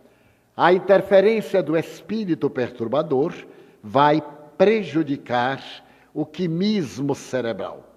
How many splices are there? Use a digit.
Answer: 0